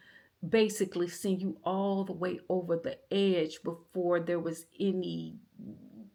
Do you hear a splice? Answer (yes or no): no